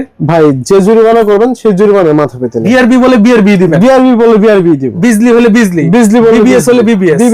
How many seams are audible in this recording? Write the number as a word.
two